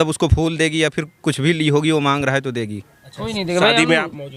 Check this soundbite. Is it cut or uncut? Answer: uncut